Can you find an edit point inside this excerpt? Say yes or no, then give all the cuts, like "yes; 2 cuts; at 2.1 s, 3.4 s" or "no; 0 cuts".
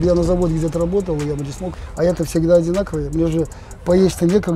yes; 1 cut; at 1.7 s